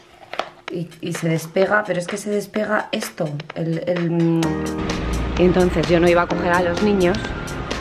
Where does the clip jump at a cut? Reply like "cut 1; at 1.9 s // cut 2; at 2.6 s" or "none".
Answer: cut 1; at 4.7 s